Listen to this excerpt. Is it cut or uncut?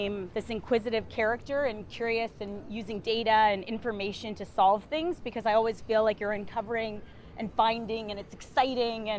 uncut